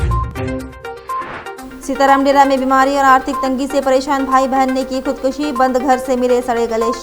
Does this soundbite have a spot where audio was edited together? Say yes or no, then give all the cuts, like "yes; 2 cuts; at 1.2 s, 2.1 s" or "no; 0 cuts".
yes; 1 cut; at 1.6 s